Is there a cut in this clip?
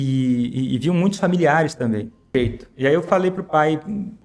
yes; 1 cut; at 2.3 s

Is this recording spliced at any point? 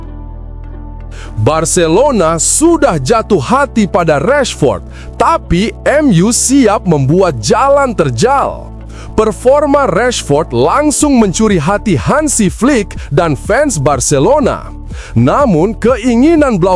yes; 1 cut; at 1.4 s

